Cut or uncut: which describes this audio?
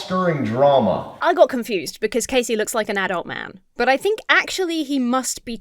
cut